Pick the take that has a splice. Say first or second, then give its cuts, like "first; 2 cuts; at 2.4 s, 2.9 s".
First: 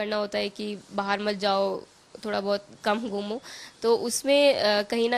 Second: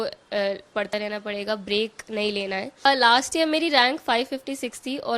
second; 1 cut; at 2.9 s